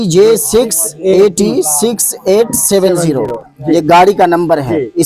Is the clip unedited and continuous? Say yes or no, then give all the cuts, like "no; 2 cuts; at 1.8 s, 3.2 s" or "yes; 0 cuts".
yes; 0 cuts